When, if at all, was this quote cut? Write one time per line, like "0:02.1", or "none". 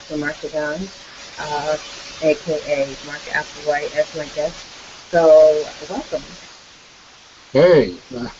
0:06.3